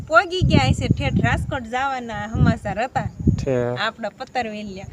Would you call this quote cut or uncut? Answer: uncut